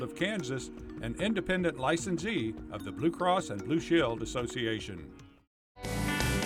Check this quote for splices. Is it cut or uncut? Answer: uncut